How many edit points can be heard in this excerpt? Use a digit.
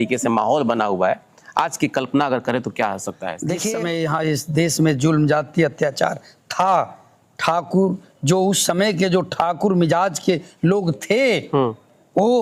1